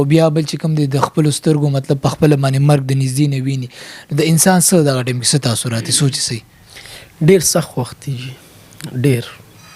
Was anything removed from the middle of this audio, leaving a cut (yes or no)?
no